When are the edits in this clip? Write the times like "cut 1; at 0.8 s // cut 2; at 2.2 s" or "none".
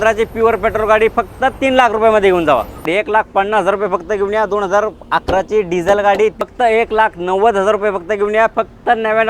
cut 1; at 2.8 s // cut 2; at 6.4 s // cut 3; at 8.5 s